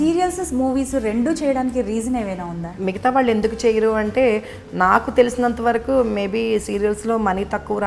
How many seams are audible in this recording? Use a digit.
1